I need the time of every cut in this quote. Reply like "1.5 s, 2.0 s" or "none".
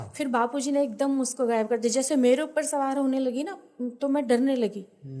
none